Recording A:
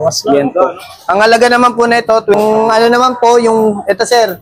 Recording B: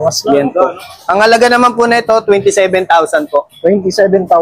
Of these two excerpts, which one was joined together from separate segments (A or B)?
A